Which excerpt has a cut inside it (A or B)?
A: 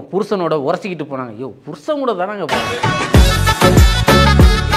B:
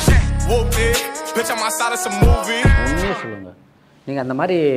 A